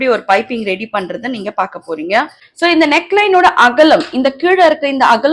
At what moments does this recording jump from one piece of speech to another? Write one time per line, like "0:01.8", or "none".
0:02.4